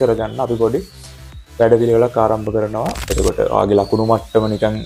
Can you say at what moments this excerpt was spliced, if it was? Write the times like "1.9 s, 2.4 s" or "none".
3.0 s